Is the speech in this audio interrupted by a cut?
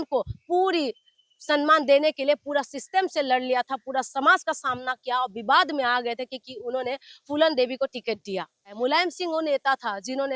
yes; 1 cut; at 8.7 s

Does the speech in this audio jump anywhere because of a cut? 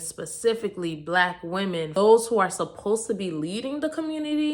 yes; 1 cut; at 1.9 s

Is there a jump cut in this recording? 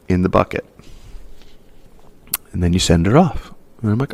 no; 0 cuts

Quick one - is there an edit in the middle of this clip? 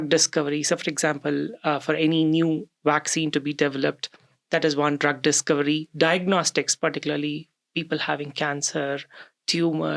no; 0 cuts

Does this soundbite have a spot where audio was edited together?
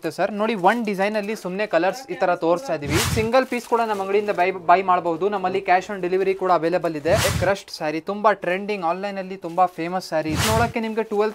yes; 3 cuts; at 3.1 s, 7.3 s, 10.4 s

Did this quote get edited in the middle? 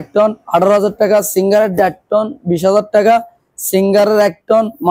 no; 0 cuts

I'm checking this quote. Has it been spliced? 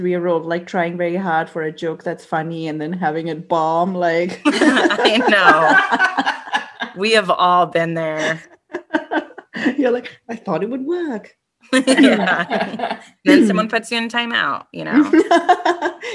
no; 0 cuts

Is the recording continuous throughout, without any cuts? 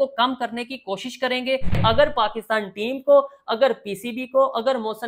no; 1 cut; at 1.8 s

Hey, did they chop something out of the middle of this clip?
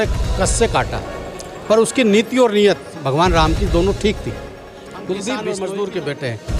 yes; 1 cut; at 5.5 s

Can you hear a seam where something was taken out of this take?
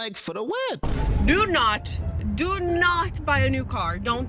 yes; 1 cut; at 1.0 s

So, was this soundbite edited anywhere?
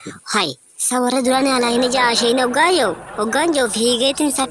no; 0 cuts

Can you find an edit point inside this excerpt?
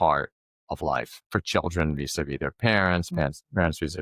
yes; 1 cut; at 1.2 s

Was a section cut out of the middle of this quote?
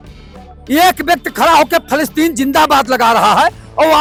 no; 0 cuts

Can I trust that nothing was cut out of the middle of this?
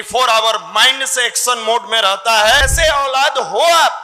no; 1 cut; at 2.7 s

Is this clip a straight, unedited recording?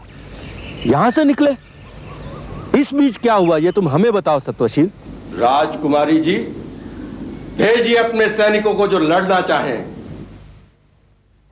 no; 1 cut; at 5.1 s

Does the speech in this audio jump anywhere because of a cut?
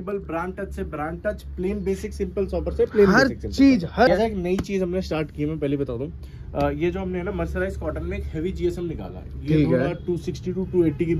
yes; 1 cut; at 4.1 s

